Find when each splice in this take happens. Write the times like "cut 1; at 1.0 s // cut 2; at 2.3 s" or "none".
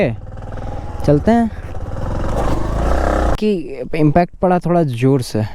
cut 1; at 1.8 s // cut 2; at 3.4 s